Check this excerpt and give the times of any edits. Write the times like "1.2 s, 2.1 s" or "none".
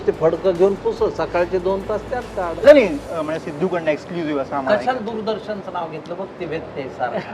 2.6 s